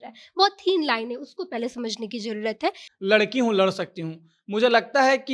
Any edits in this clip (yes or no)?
yes